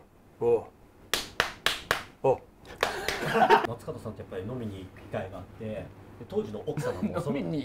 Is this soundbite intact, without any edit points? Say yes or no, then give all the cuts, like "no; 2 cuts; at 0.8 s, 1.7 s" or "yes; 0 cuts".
no; 1 cut; at 3.6 s